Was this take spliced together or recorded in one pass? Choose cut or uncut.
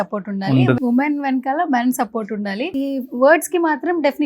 cut